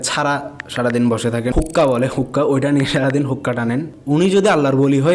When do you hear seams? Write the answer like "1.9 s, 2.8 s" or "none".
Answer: 1.5 s, 3.9 s